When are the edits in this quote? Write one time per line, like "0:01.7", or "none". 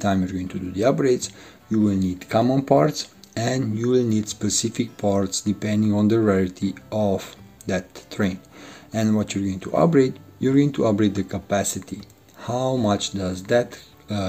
none